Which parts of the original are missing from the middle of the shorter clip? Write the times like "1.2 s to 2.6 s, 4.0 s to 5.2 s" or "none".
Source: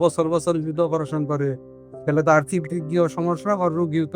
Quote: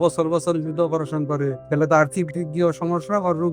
1.6 s to 2.0 s